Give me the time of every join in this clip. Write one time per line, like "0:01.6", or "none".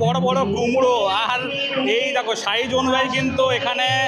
none

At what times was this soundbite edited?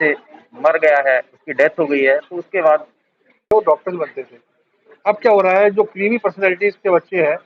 0:03.5

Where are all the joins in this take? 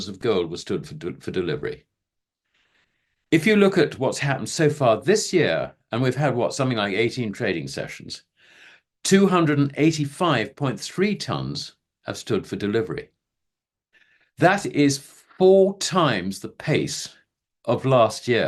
none

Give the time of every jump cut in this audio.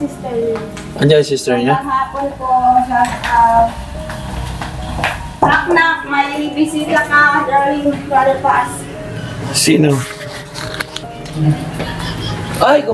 none

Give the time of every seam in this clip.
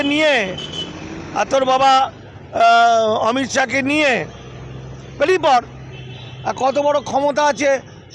none

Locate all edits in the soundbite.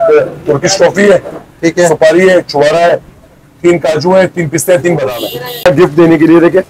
0:05.7

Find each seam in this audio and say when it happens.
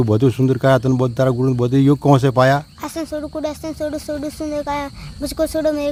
none

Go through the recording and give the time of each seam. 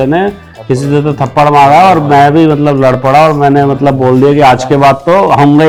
none

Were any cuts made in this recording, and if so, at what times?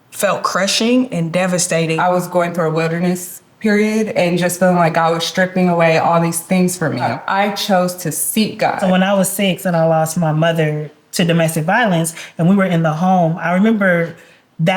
0:01.9
0:07.1
0:08.8

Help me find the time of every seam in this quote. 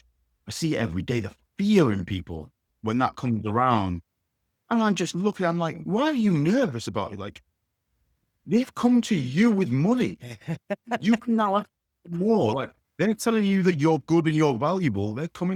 none

